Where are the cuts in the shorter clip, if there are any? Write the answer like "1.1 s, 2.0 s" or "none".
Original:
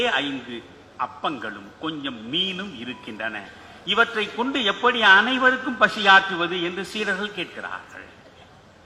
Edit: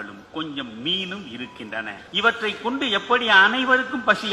2.0 s